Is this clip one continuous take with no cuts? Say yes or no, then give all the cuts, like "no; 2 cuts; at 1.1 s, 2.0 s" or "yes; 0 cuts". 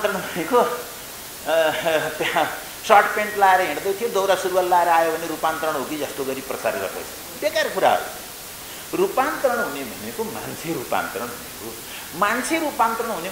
yes; 0 cuts